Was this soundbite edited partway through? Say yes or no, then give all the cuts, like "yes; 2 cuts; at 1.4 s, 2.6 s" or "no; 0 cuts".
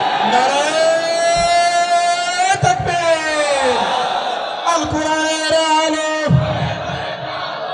no; 0 cuts